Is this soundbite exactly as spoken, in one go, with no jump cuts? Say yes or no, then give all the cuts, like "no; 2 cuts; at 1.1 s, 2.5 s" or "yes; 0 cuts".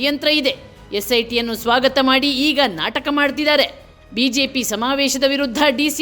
yes; 0 cuts